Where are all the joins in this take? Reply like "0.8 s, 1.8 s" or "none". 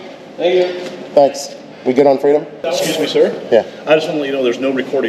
2.5 s

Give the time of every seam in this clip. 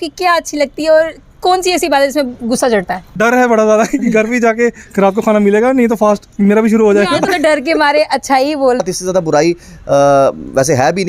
3.1 s, 7.3 s, 8.8 s

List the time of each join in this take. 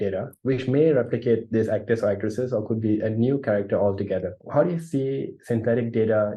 4.4 s

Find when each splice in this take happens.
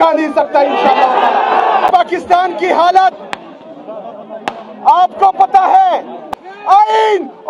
1.9 s, 6.2 s

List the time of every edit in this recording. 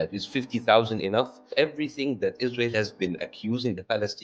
1.5 s

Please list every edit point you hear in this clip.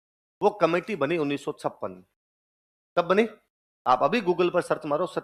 none

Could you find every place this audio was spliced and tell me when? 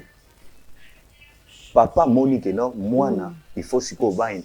none

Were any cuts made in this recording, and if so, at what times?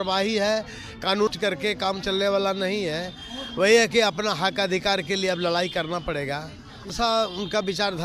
1.3 s, 6.9 s

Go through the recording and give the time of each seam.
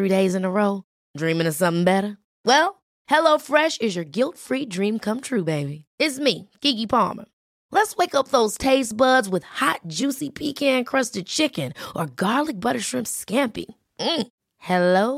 none

